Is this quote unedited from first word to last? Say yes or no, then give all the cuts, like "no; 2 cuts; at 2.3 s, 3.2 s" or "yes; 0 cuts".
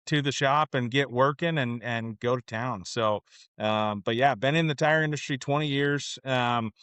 yes; 0 cuts